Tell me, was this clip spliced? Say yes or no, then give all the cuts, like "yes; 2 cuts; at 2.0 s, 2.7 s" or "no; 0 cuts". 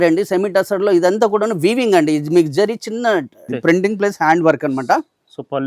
yes; 1 cut; at 3.5 s